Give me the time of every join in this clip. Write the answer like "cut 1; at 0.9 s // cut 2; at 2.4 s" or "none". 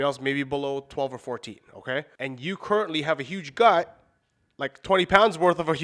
cut 1; at 2.1 s